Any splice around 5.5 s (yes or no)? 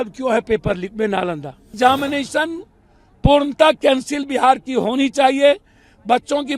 no